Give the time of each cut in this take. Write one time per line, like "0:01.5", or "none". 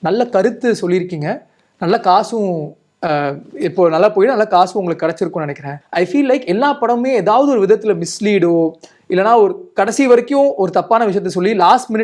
0:05.8